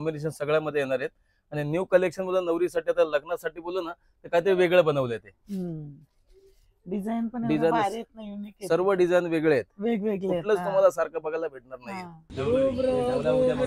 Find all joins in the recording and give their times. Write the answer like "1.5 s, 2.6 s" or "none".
12.2 s